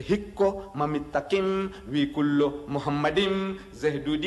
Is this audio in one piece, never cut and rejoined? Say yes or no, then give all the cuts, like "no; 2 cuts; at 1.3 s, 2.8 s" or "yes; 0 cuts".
yes; 0 cuts